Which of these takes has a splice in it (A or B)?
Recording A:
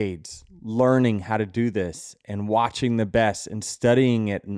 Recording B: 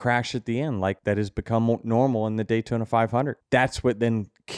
B